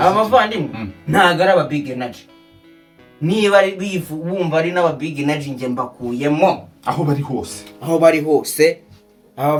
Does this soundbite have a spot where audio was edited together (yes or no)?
no